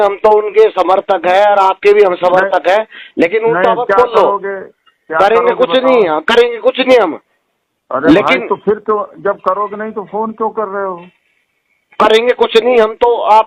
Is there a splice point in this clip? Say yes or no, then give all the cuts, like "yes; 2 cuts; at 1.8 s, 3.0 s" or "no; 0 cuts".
no; 0 cuts